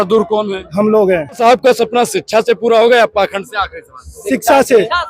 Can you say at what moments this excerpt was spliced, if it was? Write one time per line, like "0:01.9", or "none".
0:01.4